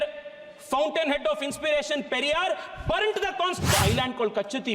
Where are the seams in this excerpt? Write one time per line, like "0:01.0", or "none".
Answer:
0:03.6